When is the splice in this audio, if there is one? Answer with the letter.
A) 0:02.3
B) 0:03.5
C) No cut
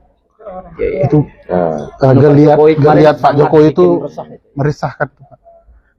C